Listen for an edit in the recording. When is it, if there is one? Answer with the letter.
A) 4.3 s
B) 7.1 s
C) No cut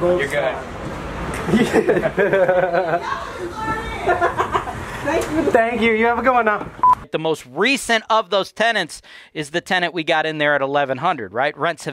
B